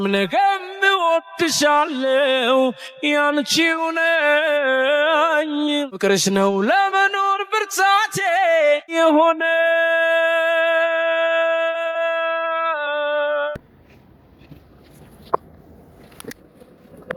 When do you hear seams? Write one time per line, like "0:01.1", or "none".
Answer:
none